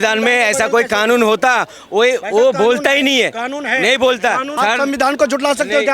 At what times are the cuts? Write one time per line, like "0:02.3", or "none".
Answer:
0:04.5

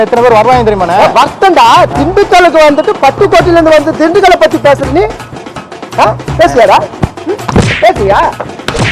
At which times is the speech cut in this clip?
none

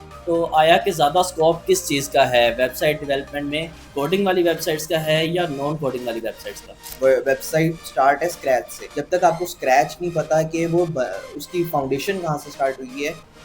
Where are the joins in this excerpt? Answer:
0:03.9
0:06.8

